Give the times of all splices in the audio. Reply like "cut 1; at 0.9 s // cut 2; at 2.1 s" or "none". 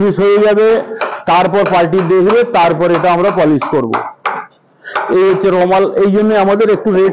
none